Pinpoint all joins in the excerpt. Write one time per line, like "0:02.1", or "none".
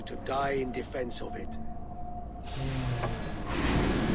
none